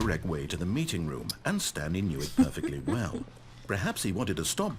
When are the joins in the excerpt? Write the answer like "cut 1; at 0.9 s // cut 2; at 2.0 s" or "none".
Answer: none